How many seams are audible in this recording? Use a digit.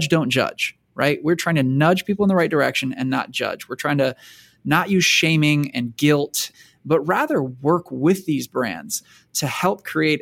2